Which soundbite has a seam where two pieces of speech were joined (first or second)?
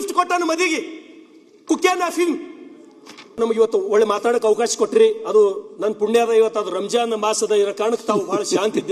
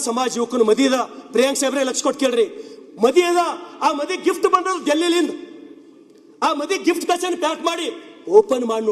first